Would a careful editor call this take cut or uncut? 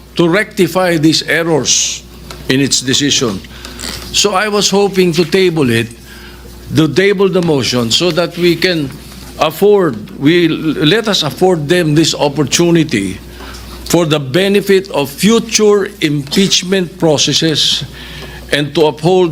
uncut